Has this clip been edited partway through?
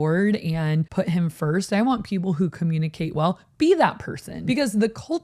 yes; 2 cuts; at 0.9 s, 4.3 s

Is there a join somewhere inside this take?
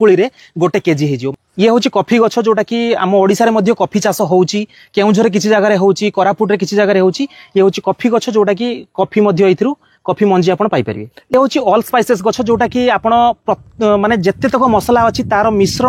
yes; 1 cut; at 1.3 s

